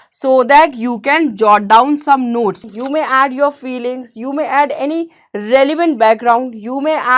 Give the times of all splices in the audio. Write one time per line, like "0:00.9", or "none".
0:02.7